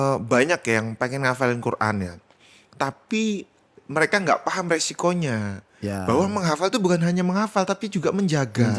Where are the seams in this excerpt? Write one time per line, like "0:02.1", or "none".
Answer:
none

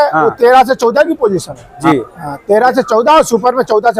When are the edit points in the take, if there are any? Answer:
0:01.7

